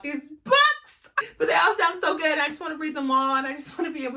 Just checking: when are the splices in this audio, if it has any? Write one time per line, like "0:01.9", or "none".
0:01.2